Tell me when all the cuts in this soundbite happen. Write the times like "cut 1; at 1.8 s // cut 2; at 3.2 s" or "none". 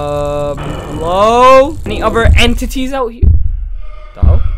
none